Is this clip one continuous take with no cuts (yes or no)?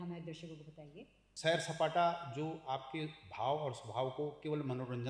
no